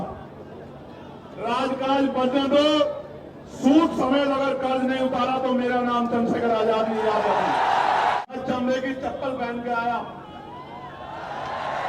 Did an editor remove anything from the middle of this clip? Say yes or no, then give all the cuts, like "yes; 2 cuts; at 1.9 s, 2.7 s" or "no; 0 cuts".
yes; 1 cut; at 8.2 s